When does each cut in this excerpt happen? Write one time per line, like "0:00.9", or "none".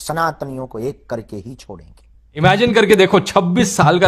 0:02.3

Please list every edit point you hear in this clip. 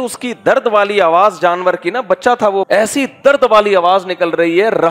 0:02.7

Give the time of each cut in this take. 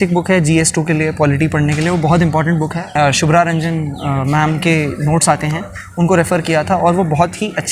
0:03.0

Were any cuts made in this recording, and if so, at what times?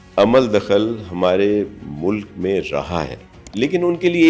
0:03.4

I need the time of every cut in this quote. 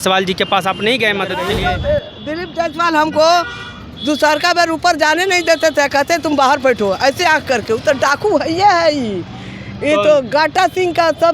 0:01.4

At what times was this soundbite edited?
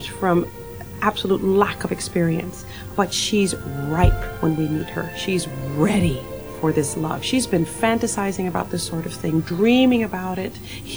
none

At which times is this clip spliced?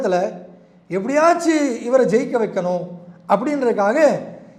none

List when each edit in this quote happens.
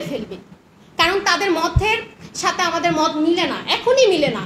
none

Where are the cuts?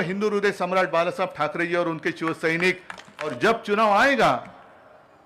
0:03.2

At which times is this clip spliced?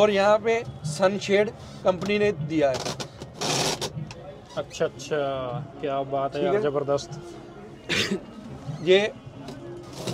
none

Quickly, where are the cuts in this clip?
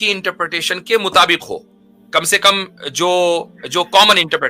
none

